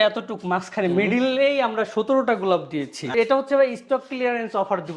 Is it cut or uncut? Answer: cut